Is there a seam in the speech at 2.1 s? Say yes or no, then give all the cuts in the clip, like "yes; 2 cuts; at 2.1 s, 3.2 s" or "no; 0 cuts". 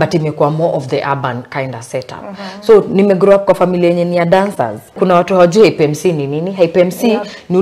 no; 1 cut; at 4.9 s